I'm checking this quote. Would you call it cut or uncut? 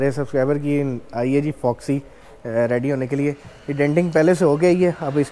uncut